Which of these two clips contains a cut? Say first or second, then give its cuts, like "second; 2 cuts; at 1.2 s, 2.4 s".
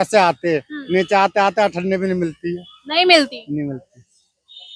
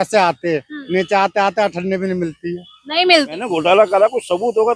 second; 1 cut; at 3.5 s